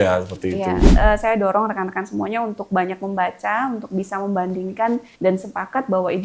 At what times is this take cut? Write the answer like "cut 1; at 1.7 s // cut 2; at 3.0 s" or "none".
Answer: cut 1; at 0.9 s // cut 2; at 5.1 s